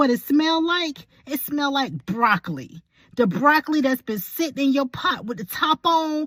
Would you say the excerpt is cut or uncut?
uncut